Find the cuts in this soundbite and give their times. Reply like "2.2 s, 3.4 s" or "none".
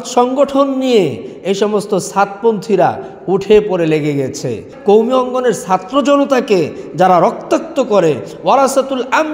4.7 s